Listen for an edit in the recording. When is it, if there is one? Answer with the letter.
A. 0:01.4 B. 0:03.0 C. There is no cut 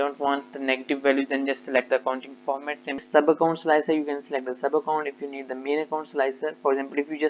B